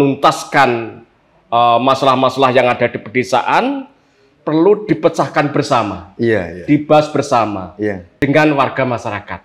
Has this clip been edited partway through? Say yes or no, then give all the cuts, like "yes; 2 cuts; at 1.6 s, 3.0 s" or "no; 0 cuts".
yes; 1 cut; at 8.1 s